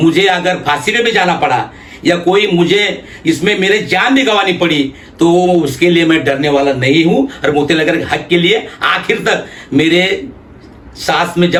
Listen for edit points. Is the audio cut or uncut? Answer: uncut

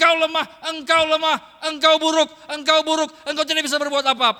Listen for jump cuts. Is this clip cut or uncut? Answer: uncut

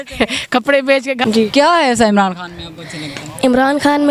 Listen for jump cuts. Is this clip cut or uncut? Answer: cut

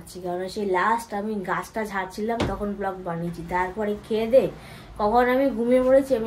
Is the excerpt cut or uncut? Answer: uncut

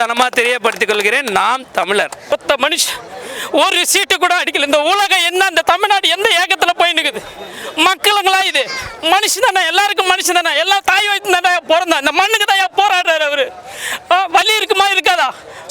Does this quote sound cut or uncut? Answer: cut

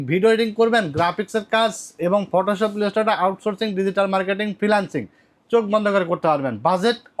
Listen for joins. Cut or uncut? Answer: uncut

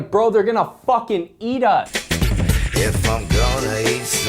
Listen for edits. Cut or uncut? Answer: cut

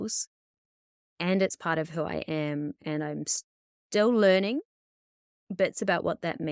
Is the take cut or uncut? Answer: uncut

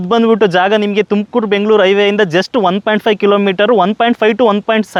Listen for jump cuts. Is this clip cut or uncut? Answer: uncut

